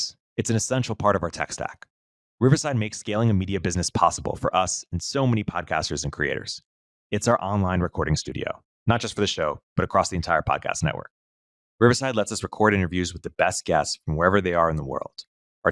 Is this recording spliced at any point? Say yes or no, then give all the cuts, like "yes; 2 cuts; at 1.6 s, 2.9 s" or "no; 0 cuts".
no; 0 cuts